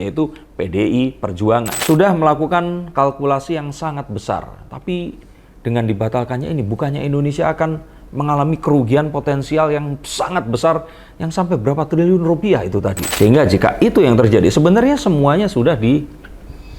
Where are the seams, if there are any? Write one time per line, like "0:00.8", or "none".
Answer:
0:01.7
0:13.0